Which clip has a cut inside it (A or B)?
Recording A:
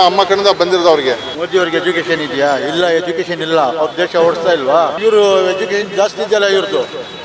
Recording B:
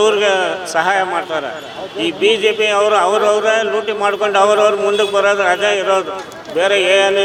A